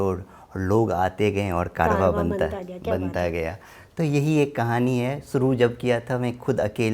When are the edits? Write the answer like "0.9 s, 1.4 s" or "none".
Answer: none